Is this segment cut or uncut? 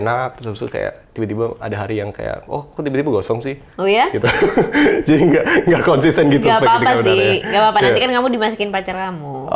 uncut